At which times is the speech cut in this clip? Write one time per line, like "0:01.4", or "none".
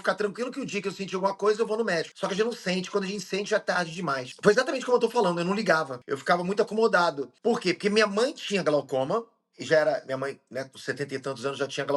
none

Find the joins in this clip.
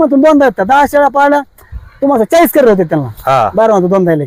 none

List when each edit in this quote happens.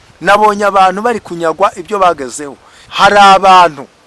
0:02.8

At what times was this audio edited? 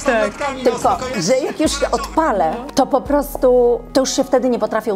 0:01.1
0:02.6
0:03.8

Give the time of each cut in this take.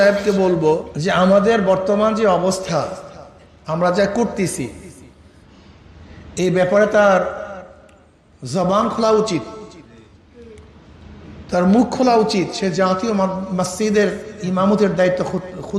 0:00.9

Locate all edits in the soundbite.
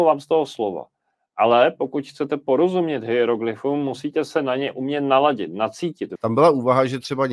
0:06.1

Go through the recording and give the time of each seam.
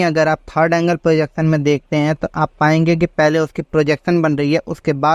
none

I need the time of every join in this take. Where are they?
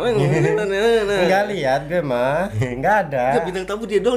0:02.5

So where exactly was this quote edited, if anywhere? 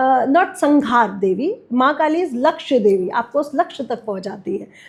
none

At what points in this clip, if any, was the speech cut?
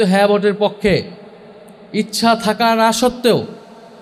none

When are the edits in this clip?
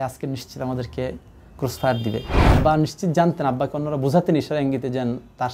0:02.3

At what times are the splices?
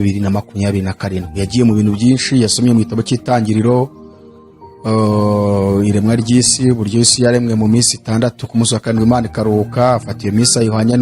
none

